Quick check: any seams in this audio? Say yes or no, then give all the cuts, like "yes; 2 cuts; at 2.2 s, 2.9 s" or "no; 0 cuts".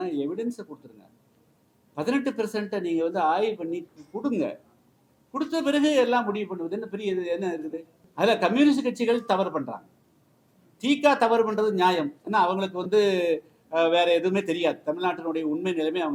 no; 0 cuts